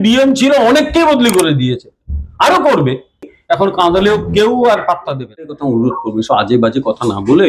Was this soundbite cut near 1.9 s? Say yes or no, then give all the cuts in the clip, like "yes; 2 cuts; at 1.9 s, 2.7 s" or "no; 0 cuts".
no; 2 cuts; at 3.2 s, 5.6 s